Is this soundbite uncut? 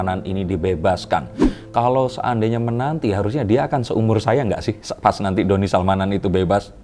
yes; 0 cuts

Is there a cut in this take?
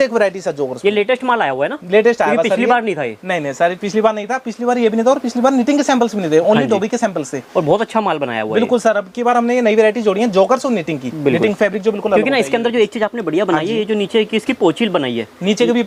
no; 0 cuts

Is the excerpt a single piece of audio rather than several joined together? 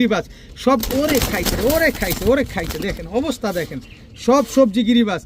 yes; 0 cuts

